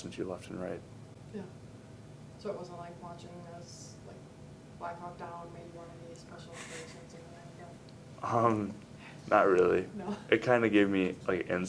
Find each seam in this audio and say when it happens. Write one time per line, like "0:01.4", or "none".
none

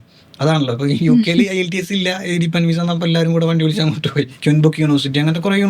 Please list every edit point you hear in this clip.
0:04.3

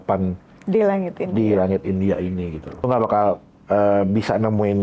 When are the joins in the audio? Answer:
0:02.9

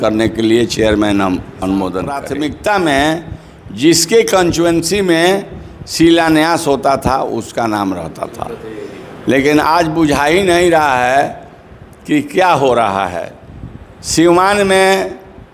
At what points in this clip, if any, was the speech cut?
0:02.2

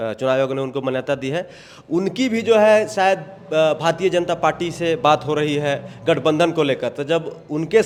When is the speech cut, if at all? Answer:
none

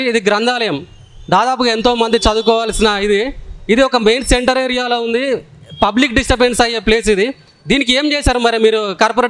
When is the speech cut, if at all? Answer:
none

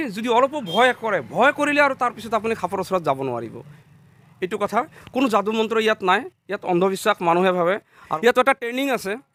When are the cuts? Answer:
none

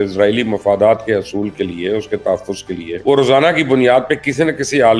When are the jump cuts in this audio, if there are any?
0:02.9

